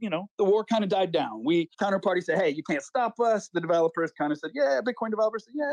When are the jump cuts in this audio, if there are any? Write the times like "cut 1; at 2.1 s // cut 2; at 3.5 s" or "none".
cut 1; at 1.7 s